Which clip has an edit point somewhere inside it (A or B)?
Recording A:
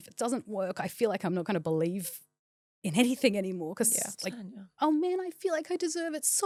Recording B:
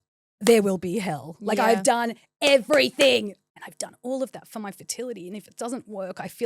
B